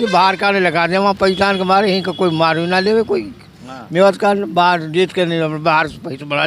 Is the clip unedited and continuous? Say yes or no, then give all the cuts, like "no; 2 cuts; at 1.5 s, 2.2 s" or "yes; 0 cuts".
yes; 0 cuts